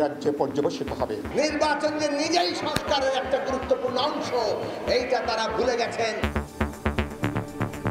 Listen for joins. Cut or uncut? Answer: cut